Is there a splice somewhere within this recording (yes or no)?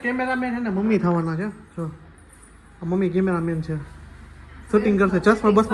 no